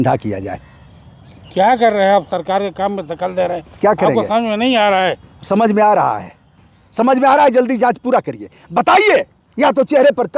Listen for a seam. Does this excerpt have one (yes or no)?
no